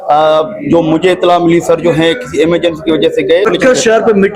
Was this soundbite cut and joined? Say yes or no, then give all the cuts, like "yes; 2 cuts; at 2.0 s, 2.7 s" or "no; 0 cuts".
yes; 1 cut; at 3.5 s